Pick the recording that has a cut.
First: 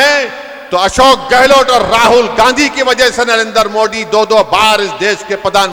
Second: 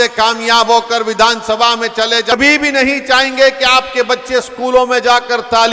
second; 1 cut; at 2.3 s

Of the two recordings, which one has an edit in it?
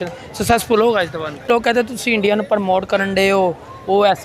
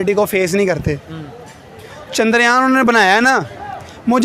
first; 1 cut; at 1.5 s

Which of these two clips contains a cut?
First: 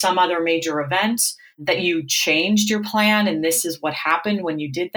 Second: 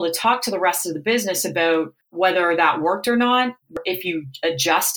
second; 2 cuts; at 2.0 s, 3.8 s

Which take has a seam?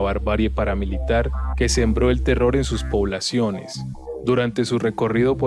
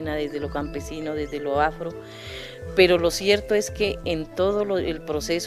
first; 1 cut; at 3.5 s

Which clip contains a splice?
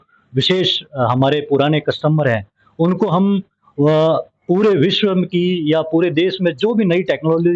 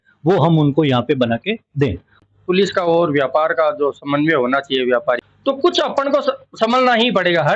second; 2 cuts; at 2.3 s, 5.2 s

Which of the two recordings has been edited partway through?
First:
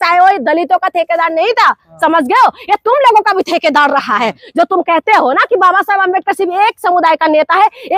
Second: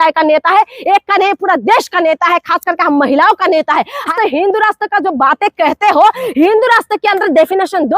second; 1 cut; at 4.1 s

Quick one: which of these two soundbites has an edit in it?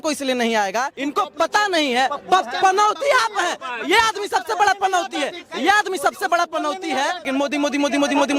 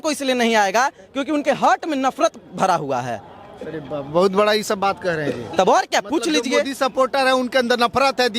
first; 2 cuts; at 1.0 s, 7.3 s

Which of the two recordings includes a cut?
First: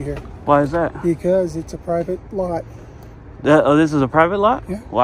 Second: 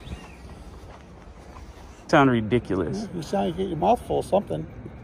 second; 1 cut; at 2.1 s

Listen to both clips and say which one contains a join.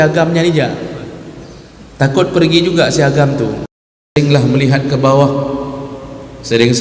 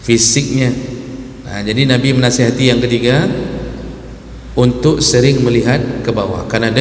first; 1 cut; at 4.2 s

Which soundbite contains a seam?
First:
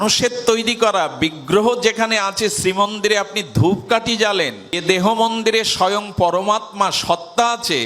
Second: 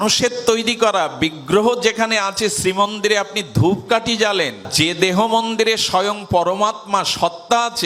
first; 1 cut; at 4.7 s

